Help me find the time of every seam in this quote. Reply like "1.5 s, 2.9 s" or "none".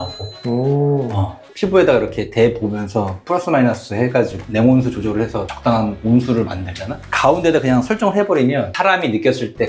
1.5 s, 7.0 s